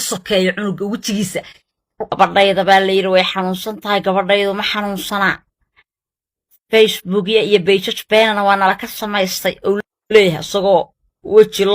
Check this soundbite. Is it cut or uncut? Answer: cut